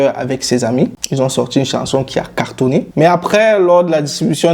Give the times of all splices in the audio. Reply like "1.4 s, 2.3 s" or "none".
1.0 s, 2.9 s